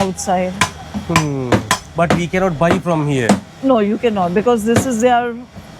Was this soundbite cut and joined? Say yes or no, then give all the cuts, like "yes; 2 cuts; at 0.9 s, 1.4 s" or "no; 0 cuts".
no; 0 cuts